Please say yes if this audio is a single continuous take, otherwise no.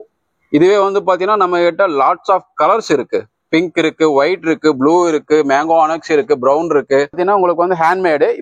no